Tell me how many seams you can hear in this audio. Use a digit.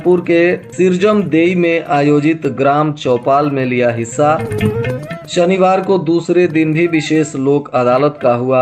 0